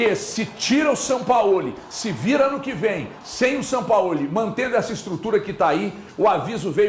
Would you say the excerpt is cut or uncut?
uncut